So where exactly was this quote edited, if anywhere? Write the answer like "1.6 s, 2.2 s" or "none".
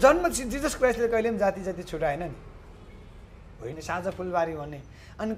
3.7 s

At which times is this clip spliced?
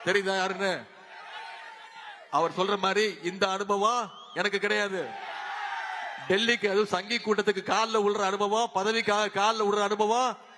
none

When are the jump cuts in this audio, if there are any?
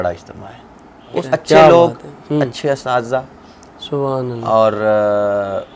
1.2 s

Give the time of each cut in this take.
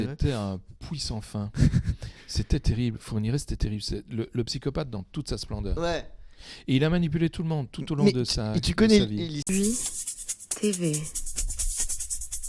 9.4 s

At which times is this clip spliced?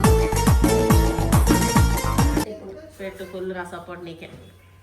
2.4 s

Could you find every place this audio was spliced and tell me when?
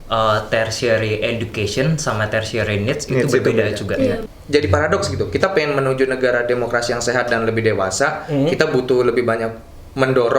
4.2 s

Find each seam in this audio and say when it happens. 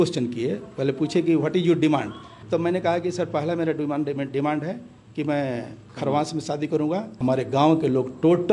2.3 s, 7.1 s

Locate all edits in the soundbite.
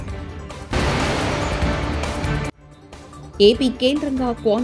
0.7 s, 2.5 s

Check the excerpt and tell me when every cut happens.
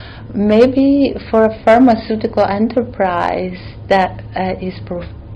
none

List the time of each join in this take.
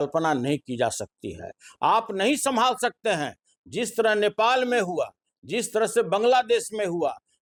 none

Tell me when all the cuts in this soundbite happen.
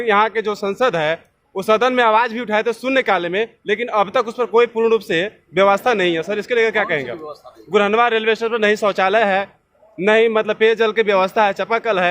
none

